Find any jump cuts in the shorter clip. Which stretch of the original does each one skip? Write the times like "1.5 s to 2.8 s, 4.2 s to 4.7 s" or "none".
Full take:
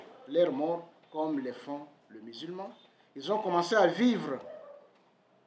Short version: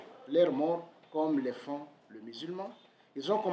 none